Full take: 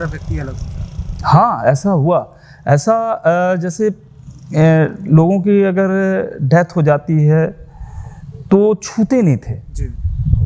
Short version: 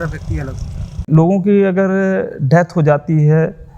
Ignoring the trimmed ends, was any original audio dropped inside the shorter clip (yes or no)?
yes